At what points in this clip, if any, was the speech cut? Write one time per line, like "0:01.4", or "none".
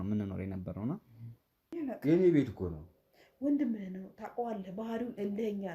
0:01.7